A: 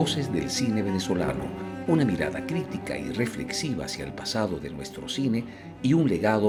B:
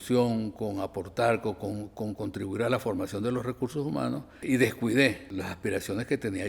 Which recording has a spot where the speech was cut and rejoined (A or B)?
B